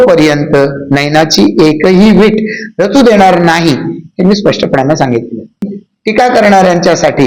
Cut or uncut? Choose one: cut